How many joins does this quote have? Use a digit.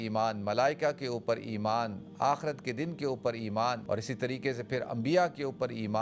1